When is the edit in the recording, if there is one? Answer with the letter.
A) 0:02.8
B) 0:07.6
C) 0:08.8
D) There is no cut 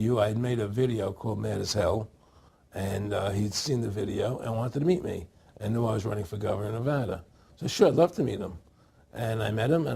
C